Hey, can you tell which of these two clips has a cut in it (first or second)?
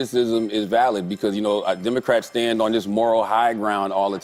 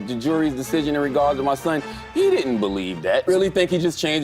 second